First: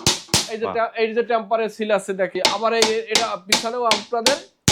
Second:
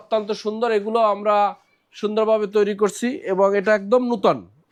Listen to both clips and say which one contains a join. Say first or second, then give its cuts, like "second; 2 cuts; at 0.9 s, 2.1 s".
first; 1 cut; at 2.3 s